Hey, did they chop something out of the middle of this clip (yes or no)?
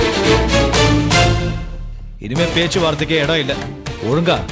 no